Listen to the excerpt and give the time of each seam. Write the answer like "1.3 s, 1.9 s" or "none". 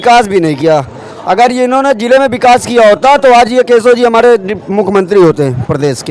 none

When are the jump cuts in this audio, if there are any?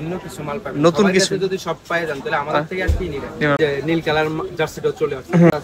3.6 s

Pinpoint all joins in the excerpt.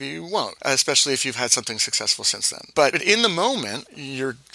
none

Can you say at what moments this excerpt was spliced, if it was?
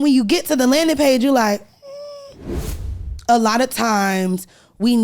2.8 s

